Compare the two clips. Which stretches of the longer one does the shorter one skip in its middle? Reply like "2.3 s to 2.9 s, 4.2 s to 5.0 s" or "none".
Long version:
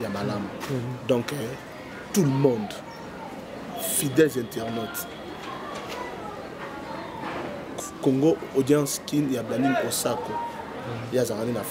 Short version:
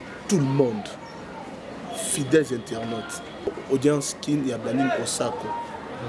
5.3 s to 8.3 s